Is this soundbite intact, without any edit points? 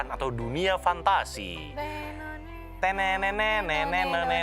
yes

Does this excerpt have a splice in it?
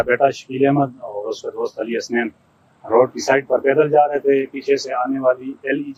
no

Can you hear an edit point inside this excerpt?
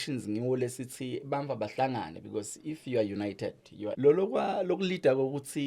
yes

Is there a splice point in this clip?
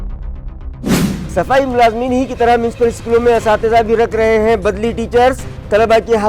yes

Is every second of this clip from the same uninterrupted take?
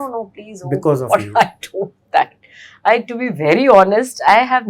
yes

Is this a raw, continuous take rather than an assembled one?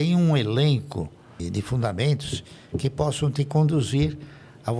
no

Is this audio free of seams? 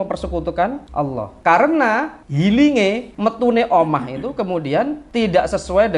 no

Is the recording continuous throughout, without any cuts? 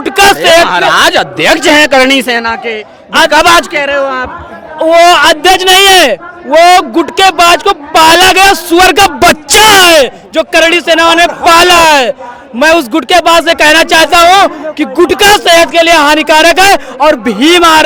yes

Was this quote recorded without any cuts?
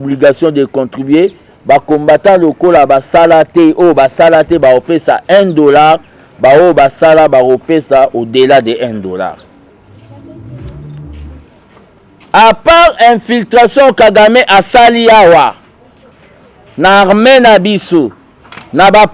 no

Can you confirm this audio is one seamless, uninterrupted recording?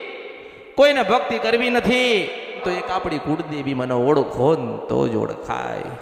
no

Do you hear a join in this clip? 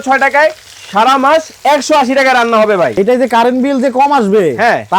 yes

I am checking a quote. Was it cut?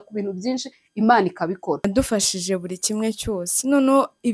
yes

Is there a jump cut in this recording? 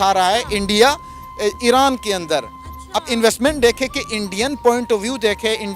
no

